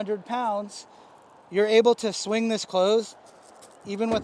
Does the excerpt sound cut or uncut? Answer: uncut